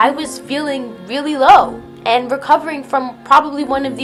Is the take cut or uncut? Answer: uncut